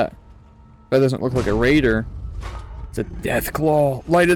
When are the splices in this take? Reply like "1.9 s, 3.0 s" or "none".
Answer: none